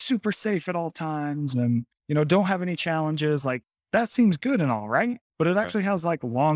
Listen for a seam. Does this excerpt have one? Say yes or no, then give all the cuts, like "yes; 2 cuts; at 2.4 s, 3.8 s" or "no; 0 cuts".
yes; 3 cuts; at 2.0 s, 3.7 s, 5.2 s